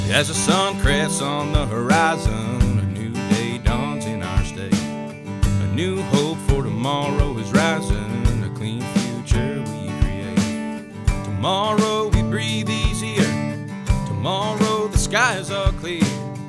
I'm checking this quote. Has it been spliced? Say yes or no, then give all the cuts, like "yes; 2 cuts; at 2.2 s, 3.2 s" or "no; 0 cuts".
no; 0 cuts